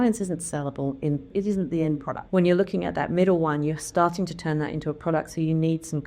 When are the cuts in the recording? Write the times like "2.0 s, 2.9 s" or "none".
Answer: 1.3 s, 2.2 s